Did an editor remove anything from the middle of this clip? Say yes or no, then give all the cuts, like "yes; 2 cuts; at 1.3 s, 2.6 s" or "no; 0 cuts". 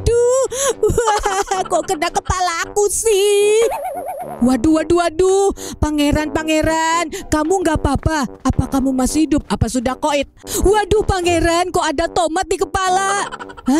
yes; 1 cut; at 10.4 s